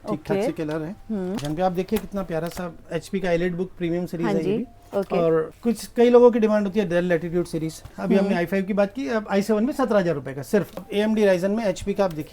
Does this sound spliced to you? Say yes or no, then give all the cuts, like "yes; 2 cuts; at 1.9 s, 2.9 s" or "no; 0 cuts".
yes; 4 cuts; at 1.4 s, 5.5 s, 7.9 s, 10.7 s